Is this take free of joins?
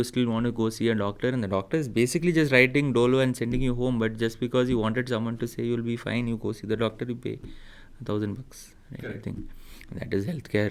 yes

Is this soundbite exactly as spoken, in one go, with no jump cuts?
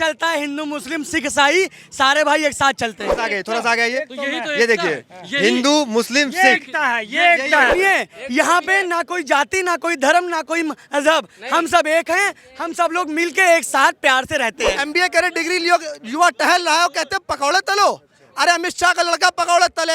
no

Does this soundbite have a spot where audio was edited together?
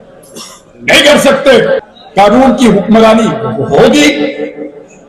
yes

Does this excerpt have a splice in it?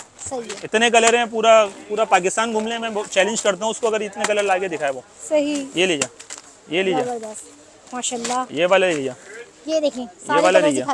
no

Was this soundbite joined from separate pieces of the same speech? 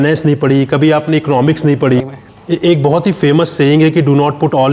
yes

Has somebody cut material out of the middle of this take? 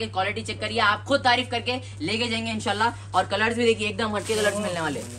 no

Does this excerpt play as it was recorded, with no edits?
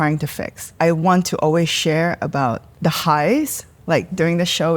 no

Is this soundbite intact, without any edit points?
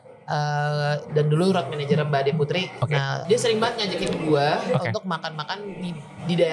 no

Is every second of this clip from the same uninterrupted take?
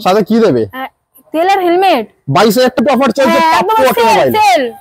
no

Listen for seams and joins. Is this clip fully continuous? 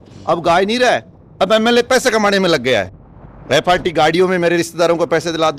yes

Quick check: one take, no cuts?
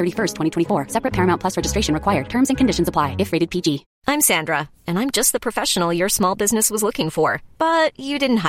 no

